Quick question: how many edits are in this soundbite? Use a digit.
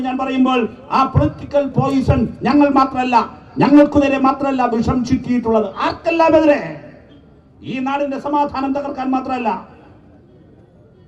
0